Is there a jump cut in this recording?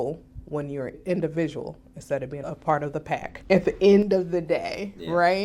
yes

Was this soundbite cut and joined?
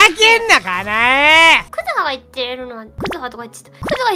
yes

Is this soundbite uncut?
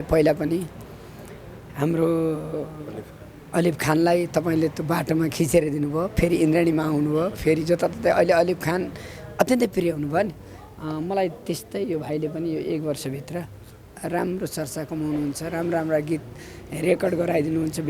yes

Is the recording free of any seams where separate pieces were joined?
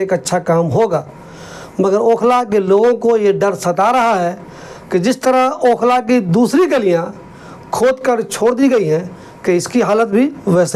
yes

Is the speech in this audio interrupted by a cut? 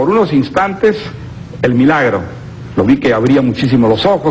no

